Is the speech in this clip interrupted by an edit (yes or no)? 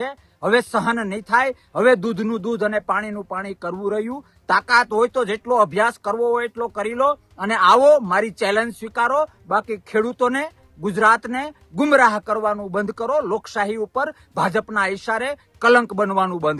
no